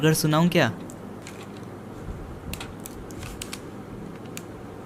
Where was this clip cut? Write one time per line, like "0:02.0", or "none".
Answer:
none